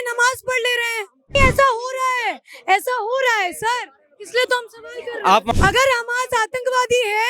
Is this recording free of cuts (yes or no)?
no